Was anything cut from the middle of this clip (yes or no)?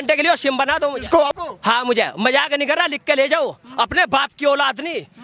yes